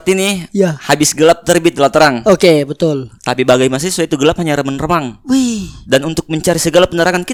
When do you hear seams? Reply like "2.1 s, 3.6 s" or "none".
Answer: none